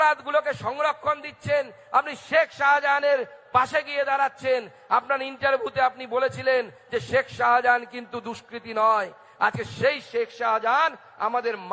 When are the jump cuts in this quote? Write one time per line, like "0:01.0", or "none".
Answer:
0:02.2